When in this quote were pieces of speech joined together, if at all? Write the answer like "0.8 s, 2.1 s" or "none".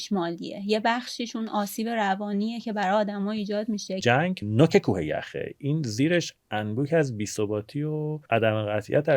4.0 s, 8.2 s